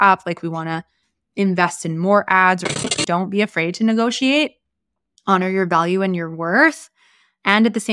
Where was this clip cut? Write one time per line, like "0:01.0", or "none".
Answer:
0:02.9